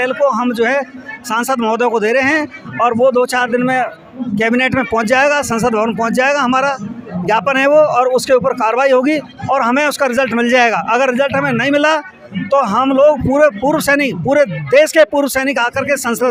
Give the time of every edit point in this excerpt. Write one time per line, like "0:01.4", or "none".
none